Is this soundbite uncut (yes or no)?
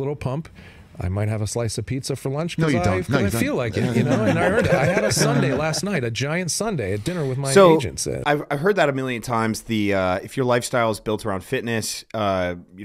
yes